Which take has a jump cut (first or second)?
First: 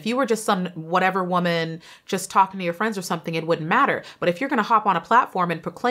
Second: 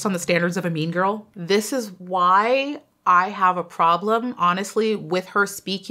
second